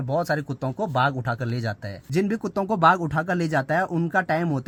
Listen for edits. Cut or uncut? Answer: uncut